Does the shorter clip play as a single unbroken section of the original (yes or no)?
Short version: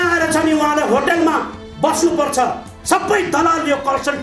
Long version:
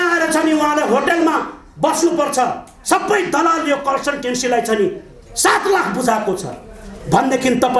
yes